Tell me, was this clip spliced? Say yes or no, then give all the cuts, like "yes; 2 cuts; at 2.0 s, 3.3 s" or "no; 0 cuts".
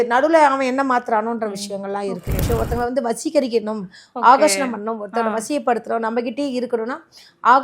yes; 1 cut; at 2.4 s